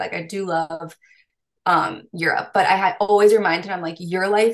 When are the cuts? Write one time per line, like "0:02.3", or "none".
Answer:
none